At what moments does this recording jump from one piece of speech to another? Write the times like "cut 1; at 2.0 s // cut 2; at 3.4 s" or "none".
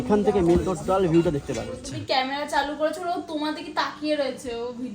cut 1; at 1.9 s